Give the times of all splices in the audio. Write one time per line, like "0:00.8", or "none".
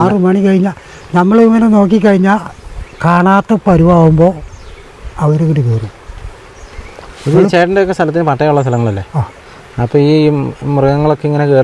none